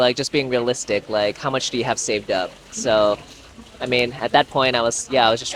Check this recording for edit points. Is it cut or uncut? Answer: uncut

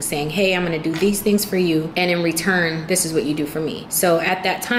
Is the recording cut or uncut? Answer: cut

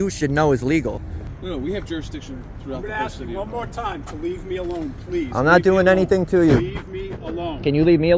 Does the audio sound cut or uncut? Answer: cut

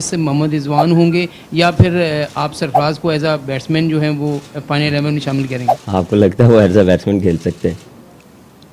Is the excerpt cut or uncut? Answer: uncut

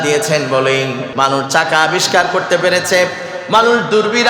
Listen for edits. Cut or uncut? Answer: cut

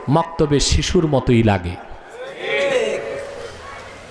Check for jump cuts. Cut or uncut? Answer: uncut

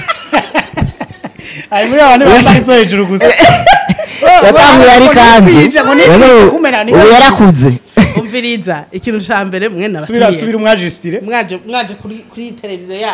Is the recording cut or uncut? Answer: uncut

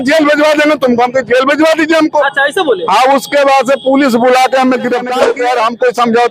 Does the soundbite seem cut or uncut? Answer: cut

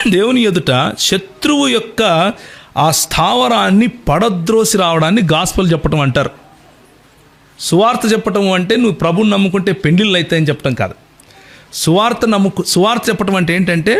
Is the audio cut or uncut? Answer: uncut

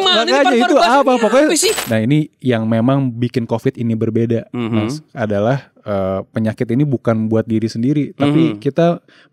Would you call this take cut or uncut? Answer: cut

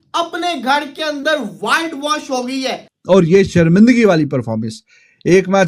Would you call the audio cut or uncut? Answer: cut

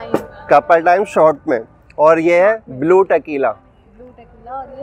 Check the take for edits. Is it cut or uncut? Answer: uncut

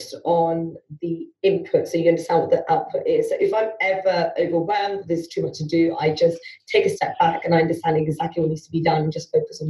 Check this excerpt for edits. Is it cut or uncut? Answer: uncut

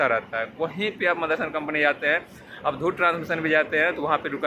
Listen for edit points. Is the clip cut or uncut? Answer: uncut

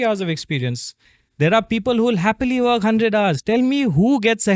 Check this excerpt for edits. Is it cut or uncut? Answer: cut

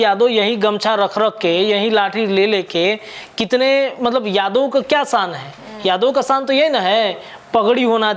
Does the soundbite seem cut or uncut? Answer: uncut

